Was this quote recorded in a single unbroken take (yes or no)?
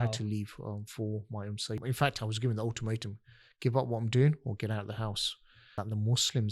no